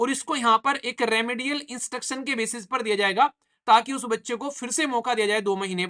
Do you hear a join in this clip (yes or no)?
no